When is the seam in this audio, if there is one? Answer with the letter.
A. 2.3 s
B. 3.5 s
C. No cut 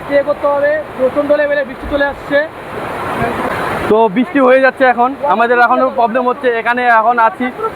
B